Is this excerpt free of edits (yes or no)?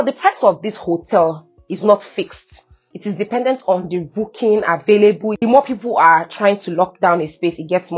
no